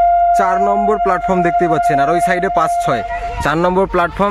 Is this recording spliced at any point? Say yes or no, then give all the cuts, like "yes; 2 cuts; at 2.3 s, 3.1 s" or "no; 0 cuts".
no; 0 cuts